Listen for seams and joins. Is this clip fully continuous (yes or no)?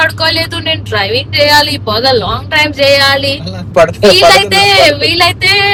yes